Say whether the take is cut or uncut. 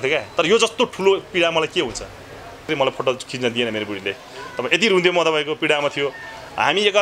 cut